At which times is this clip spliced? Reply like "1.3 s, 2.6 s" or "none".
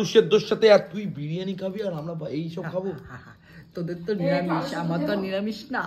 none